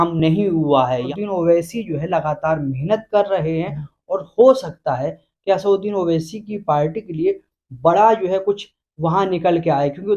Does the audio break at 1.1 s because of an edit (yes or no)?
yes